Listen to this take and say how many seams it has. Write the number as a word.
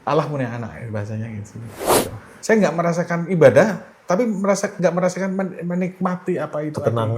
one